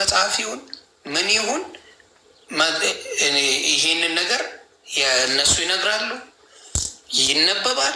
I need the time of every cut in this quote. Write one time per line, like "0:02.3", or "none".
none